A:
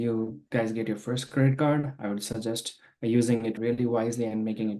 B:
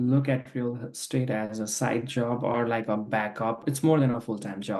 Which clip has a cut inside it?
B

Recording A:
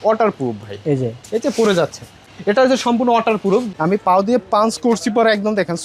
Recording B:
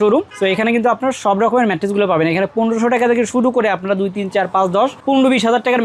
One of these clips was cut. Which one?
A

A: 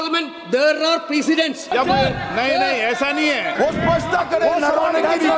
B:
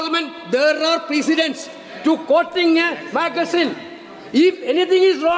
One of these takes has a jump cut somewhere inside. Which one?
A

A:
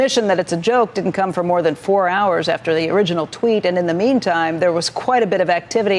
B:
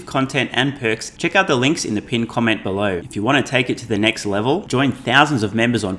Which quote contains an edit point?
B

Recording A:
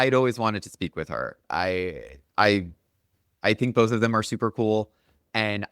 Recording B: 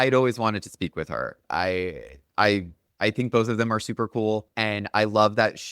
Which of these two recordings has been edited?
B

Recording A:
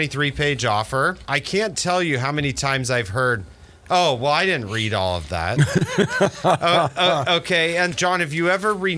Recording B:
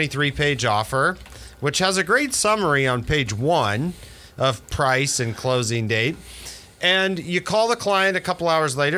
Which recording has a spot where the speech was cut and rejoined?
A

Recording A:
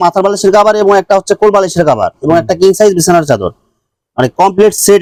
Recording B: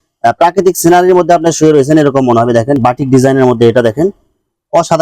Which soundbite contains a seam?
B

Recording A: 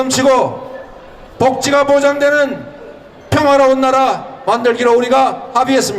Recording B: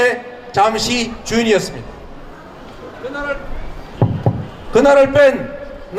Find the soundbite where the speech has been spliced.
A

